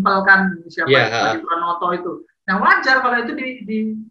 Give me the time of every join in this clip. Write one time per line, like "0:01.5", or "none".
none

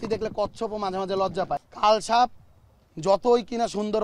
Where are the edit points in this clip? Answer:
0:01.6

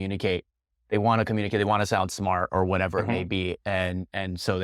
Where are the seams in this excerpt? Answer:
none

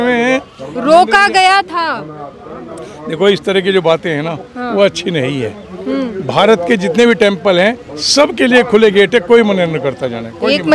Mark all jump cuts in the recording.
none

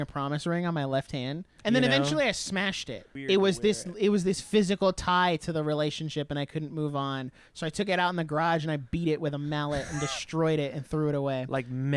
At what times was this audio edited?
0:01.5
0:03.2

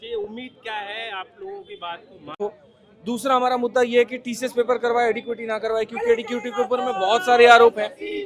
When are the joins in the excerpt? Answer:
0:02.4

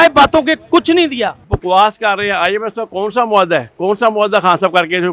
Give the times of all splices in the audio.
0:01.5

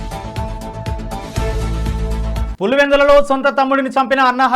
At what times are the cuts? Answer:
0:02.5

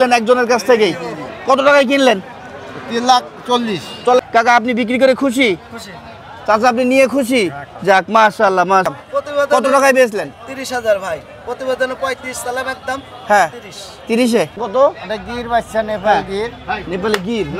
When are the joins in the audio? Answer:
0:04.2
0:09.0
0:14.6

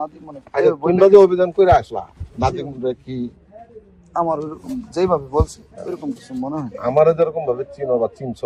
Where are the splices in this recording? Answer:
none

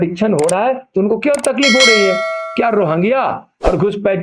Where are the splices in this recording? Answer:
none

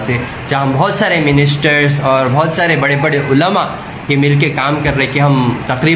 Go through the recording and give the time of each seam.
none

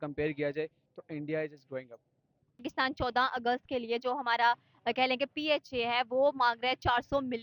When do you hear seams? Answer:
0:02.6

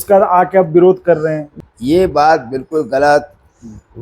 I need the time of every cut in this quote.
0:01.5

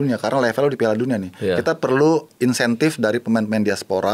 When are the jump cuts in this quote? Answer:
0:02.3

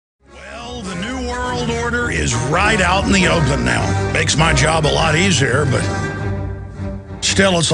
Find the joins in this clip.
none

